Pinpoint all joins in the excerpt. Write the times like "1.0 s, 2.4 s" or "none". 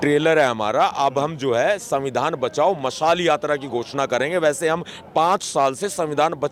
none

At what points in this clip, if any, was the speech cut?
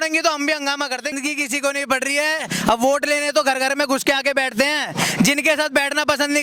1.1 s

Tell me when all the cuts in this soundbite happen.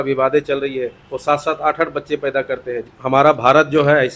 2.9 s

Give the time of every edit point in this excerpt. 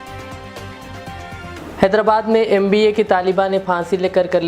1.5 s

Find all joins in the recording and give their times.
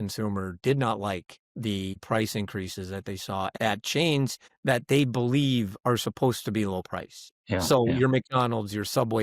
1.9 s, 3.5 s, 4.5 s, 7.7 s

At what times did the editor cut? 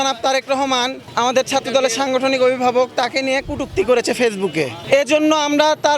1.0 s, 4.8 s

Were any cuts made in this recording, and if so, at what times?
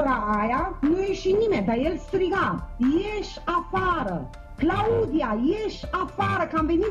none

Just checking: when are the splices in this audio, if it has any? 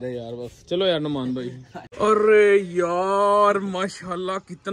1.9 s

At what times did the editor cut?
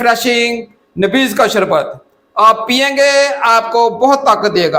none

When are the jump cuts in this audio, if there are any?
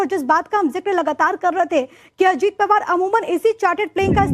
1.4 s

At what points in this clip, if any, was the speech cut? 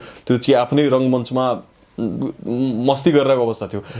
none

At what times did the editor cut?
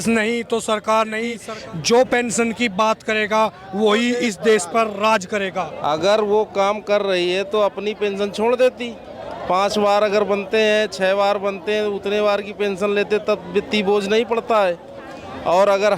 1.4 s, 5.7 s

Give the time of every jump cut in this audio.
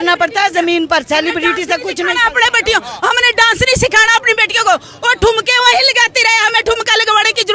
none

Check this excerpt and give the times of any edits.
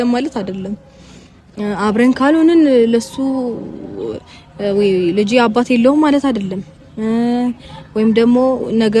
none

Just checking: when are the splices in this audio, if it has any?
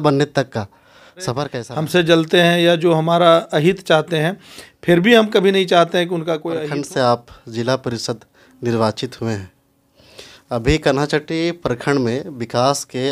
1.5 s, 6.6 s

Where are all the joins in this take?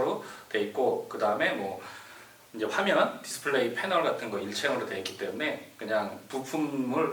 none

